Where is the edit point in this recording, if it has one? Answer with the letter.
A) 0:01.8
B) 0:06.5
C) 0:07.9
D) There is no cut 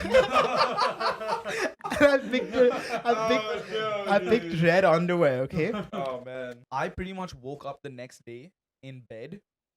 B